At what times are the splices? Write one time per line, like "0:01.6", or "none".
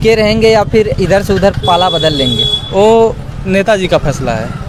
none

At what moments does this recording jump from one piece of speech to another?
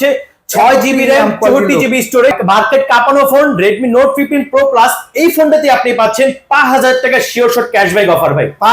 0:02.4

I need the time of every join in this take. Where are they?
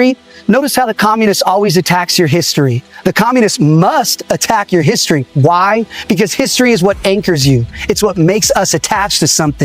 none

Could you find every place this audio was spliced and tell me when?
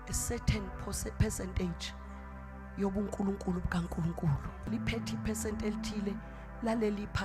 0:04.7

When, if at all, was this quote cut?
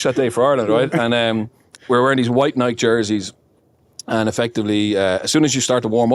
none

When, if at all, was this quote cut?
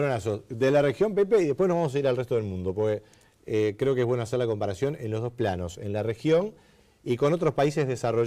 0:02.0

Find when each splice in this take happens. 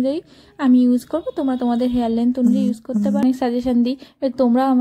0:03.2

